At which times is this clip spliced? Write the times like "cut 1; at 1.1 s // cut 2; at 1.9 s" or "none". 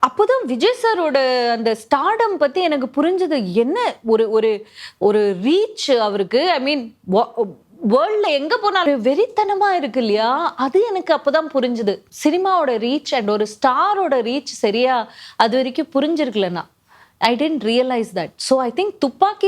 cut 1; at 8.9 s // cut 2; at 12.1 s